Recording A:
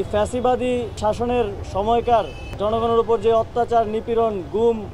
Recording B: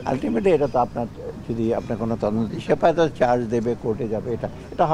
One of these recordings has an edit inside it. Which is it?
A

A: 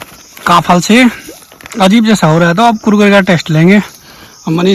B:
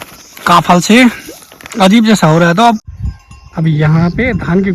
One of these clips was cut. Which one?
B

